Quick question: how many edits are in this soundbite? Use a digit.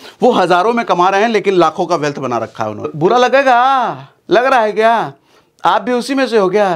1